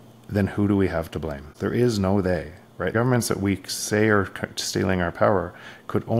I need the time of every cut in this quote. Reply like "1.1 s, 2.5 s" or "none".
1.5 s, 2.9 s